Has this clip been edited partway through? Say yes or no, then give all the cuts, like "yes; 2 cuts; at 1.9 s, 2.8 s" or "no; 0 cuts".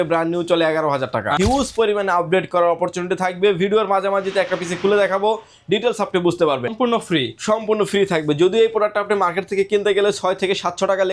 yes; 2 cuts; at 1.4 s, 6.7 s